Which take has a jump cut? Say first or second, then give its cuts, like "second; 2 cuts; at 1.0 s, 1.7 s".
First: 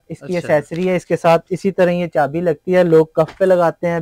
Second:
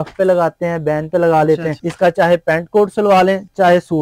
second; 1 cut; at 1.8 s